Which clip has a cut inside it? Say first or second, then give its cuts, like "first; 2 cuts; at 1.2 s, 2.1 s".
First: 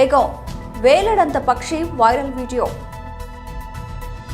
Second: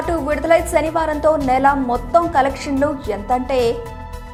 first; 1 cut; at 3.0 s